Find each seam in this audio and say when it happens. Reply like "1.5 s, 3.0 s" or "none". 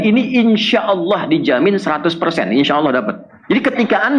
3.3 s